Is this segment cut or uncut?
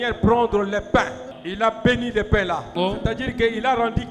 cut